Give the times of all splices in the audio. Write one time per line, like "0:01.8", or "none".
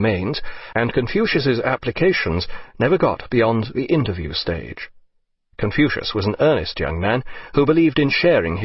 0:01.6